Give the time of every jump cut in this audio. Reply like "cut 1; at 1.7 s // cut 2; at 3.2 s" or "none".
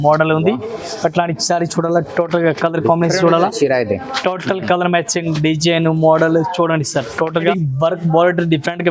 cut 1; at 7.4 s